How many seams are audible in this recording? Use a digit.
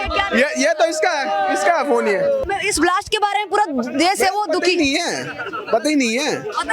1